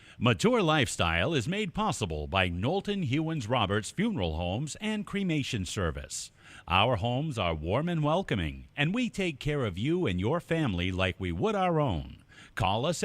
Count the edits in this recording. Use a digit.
1